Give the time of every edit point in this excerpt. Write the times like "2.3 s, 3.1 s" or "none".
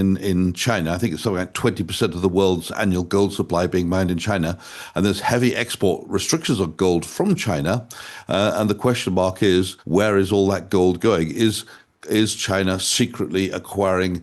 none